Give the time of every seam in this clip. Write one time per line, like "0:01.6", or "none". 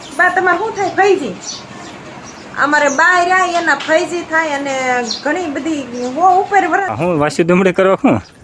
0:06.8

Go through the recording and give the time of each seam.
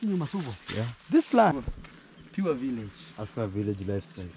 0:01.5

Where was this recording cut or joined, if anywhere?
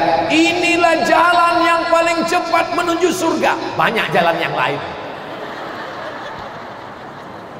none

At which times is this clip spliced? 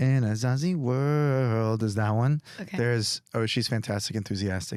none

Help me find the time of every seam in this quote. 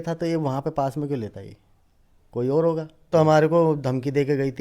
0:03.1

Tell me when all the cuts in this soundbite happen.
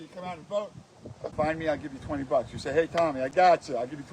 0:01.3

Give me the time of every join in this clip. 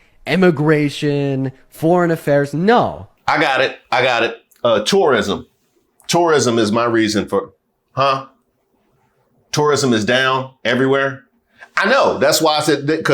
0:03.1

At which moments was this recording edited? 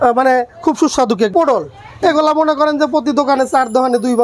0:01.3

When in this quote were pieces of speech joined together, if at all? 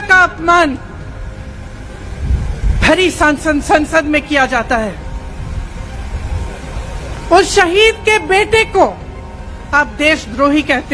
none

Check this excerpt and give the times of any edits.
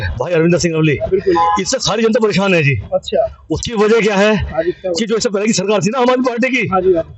none

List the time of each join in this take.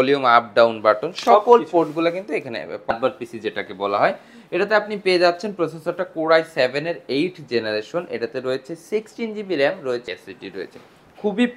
0:02.9
0:10.0

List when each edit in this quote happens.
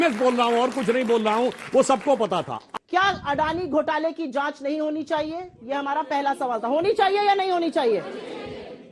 0:02.6

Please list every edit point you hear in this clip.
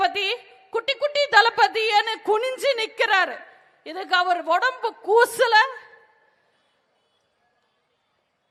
none

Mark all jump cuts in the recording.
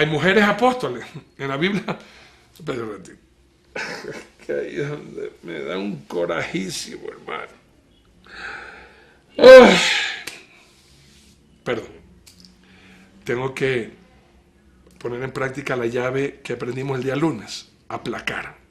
0:15.4

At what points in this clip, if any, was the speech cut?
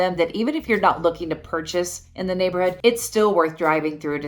0:02.8

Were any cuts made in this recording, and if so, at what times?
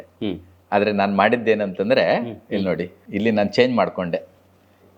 0:02.9

